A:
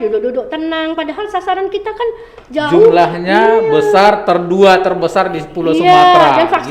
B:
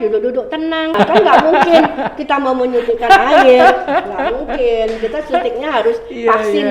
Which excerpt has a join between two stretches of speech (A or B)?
B